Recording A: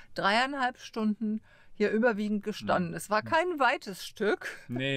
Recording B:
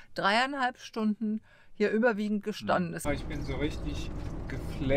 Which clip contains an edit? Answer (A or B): B